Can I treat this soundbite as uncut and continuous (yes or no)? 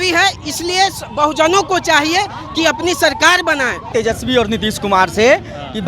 no